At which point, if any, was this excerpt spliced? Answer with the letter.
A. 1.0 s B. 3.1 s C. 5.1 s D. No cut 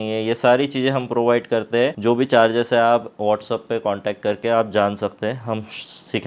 D